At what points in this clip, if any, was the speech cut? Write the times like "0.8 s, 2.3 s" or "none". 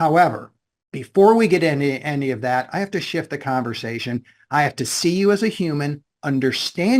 none